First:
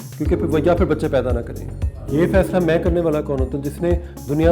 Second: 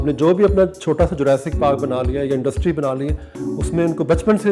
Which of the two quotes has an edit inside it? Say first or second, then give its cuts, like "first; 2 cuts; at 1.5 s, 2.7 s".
first; 1 cut; at 2.0 s